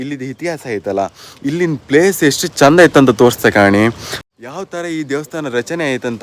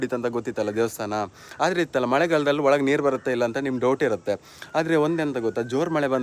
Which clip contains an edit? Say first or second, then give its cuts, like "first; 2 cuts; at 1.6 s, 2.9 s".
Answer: first; 1 cut; at 4.2 s